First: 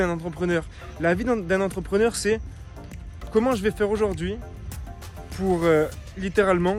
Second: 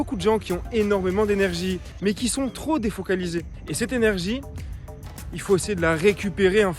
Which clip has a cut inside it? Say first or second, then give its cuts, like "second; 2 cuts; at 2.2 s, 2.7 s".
second; 2 cuts; at 1.9 s, 3.6 s